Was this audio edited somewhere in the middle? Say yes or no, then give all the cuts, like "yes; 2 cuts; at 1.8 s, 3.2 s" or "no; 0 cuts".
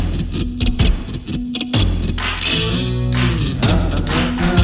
no; 0 cuts